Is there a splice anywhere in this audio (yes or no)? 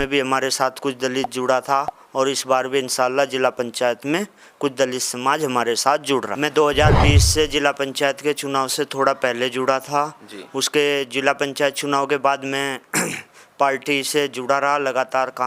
yes